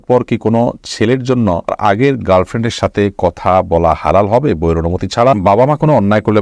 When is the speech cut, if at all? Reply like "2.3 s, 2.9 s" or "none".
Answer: 1.8 s, 5.4 s